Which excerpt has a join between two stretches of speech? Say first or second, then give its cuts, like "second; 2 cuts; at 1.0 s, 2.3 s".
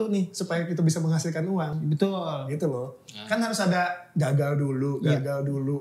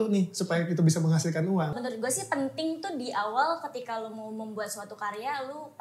second; 1 cut; at 1.7 s